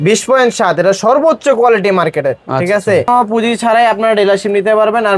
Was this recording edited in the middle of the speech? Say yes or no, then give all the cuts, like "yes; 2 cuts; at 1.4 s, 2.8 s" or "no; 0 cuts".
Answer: yes; 1 cut; at 3.1 s